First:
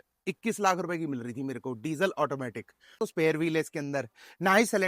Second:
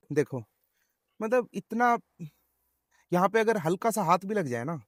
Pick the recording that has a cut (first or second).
first